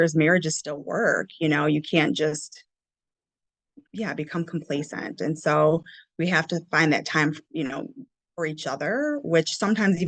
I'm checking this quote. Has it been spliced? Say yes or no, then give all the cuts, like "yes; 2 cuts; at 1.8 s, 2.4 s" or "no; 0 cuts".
no; 0 cuts